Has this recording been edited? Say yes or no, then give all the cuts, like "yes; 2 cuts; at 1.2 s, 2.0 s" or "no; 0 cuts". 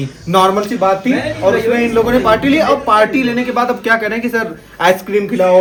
no; 0 cuts